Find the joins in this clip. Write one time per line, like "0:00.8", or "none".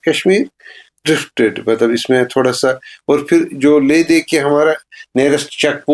none